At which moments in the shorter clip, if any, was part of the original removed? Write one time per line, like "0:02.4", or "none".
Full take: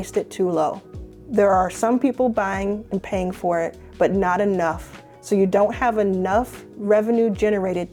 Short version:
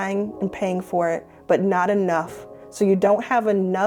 none